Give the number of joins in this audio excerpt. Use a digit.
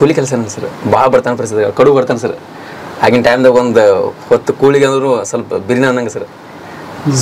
0